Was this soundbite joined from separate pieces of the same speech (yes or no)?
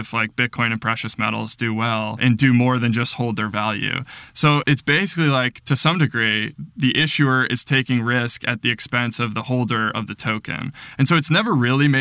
yes